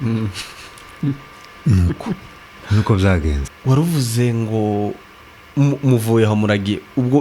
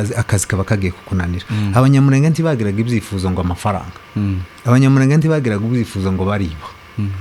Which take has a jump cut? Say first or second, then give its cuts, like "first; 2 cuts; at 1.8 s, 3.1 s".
first; 1 cut; at 3.5 s